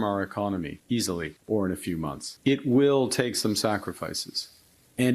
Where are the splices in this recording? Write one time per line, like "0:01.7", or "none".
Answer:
0:01.2
0:02.3

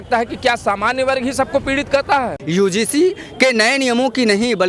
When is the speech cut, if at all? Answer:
0:02.4

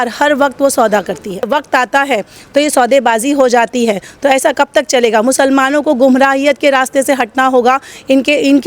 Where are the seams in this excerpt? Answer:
0:01.5

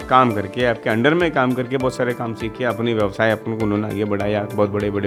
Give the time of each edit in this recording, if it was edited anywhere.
none

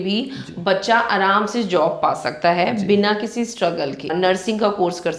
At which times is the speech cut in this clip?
0:04.1

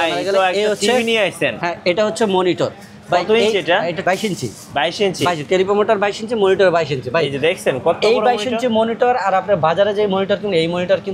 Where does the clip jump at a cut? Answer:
0:04.0

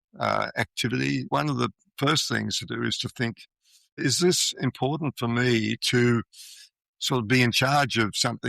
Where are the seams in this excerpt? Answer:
0:01.2
0:04.0

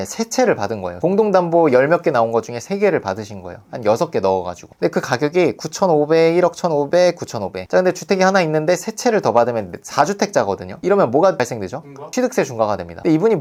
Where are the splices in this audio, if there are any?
none

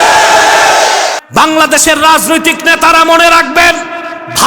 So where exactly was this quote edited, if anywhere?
0:01.2

